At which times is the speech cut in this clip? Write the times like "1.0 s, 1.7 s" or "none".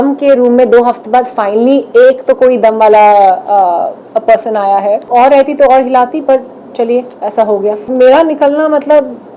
5.1 s, 7.9 s